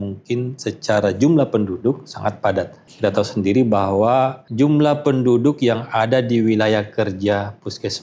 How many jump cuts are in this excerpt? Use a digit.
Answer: 2